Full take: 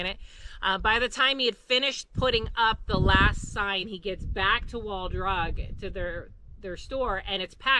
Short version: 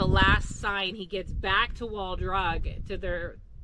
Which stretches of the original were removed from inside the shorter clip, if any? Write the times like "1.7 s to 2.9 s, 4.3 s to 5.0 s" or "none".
none

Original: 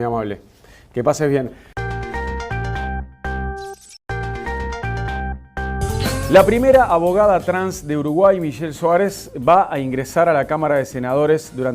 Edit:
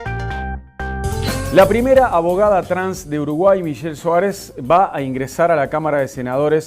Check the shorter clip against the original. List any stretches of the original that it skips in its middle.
3.4 s to 5.8 s

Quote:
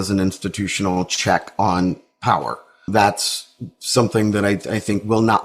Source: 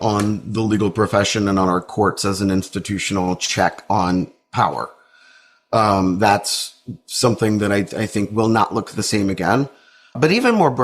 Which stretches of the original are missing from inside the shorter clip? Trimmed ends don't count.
5.2 s to 6.2 s

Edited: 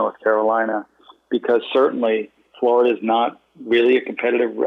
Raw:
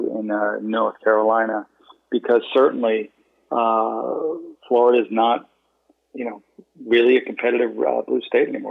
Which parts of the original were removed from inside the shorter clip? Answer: 3.2 s to 4.5 s, 5.6 s to 6.7 s

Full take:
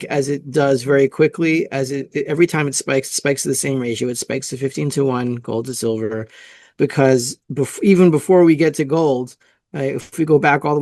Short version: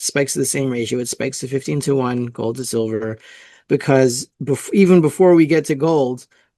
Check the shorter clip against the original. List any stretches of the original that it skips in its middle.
none

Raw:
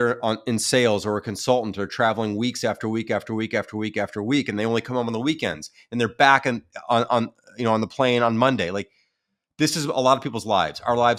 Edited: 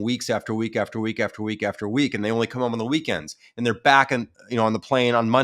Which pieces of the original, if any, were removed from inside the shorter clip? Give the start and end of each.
6.7 s to 7.4 s

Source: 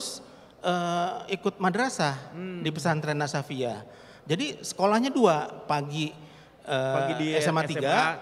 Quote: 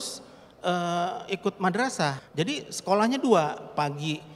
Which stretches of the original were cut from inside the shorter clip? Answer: 2.2 s to 4.2 s

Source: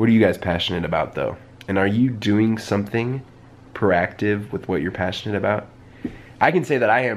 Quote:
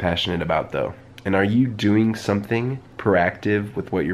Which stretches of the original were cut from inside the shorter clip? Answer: 3.3 s to 3.6 s

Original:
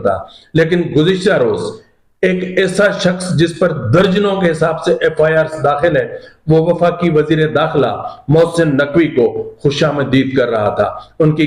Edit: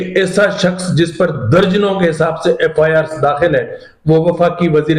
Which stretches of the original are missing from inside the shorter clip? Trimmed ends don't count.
none

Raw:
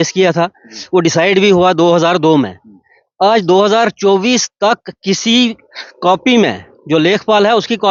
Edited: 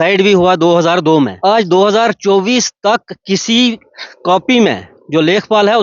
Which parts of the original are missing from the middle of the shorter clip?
2.5 s to 3.1 s

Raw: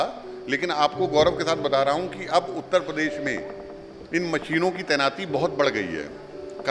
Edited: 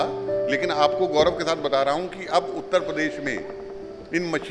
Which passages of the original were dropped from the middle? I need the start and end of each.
none

